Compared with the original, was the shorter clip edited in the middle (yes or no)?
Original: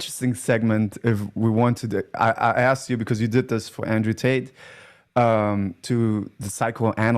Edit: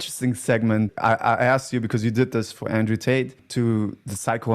yes